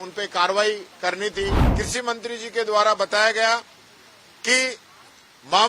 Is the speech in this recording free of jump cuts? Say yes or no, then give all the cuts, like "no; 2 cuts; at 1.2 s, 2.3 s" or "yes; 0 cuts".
no; 1 cut; at 1.7 s